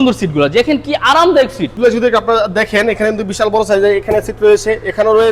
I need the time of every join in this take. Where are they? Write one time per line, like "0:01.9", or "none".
0:01.7